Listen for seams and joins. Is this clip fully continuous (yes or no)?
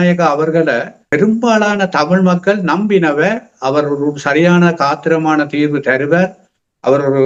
yes